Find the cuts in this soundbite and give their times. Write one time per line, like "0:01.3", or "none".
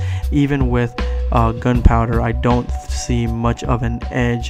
none